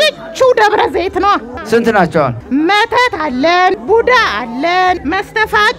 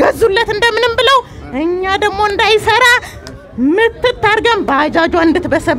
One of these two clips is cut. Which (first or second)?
first